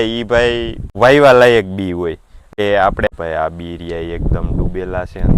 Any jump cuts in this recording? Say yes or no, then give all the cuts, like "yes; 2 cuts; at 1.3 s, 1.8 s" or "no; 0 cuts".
yes; 1 cut; at 3.1 s